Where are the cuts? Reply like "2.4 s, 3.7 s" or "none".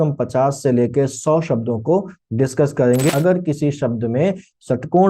3.1 s